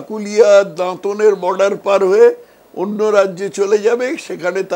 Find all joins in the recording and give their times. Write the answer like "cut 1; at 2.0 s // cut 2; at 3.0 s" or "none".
none